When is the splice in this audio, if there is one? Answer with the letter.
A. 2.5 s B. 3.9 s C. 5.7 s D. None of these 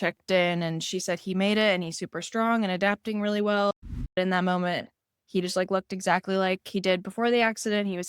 B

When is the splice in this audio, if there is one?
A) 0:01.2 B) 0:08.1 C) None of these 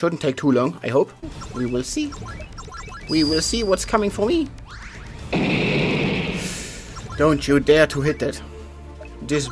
C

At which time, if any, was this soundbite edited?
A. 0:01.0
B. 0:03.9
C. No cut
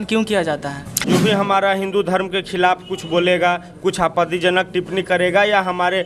A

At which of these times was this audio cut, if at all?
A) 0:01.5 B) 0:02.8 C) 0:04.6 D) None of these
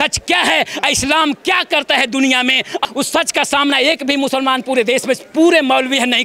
B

